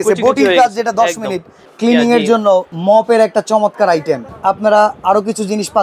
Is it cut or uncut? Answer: cut